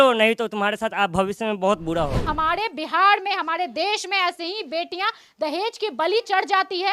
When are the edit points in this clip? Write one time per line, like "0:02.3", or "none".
0:02.3